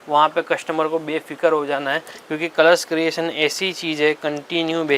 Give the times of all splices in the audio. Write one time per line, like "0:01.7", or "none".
none